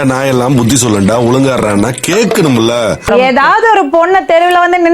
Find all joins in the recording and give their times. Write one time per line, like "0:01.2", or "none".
0:03.0